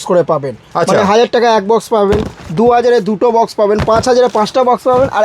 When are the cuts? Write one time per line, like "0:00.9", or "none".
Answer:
none